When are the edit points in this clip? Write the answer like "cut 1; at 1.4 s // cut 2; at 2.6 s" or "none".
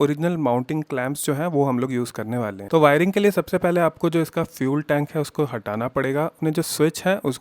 cut 1; at 2.6 s // cut 2; at 6.4 s